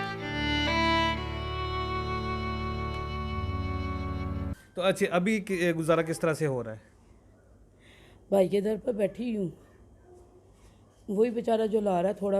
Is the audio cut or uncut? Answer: cut